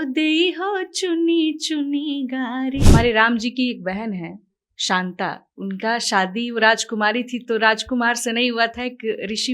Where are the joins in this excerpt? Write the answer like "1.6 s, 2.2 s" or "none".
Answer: 2.8 s